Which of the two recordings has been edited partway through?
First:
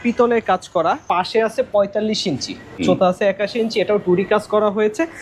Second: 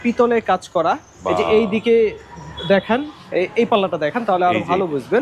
first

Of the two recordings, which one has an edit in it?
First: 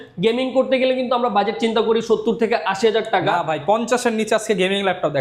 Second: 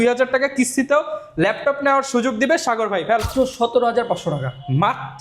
second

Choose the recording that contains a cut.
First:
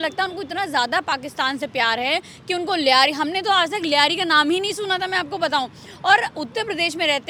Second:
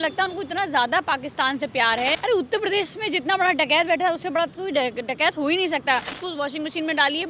second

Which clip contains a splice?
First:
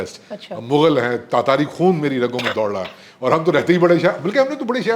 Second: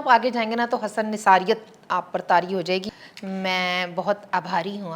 second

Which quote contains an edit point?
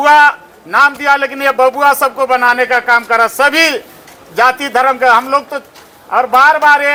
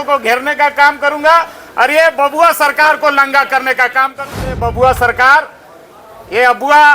second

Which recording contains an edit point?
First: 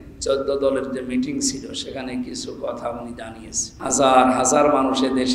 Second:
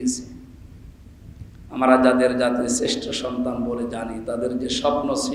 first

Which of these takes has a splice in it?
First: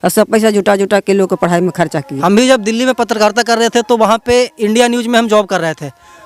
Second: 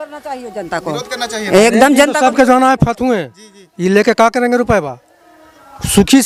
first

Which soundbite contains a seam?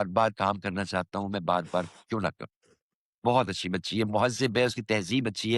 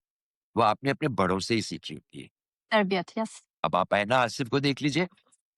second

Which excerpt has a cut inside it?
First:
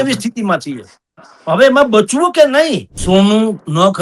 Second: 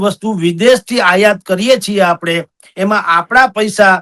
first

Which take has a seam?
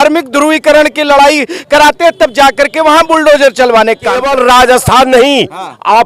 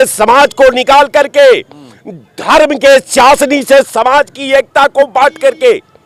first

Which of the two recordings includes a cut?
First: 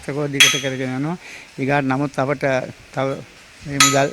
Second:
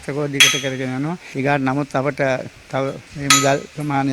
second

